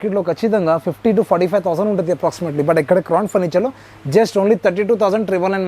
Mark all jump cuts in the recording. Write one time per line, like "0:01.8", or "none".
none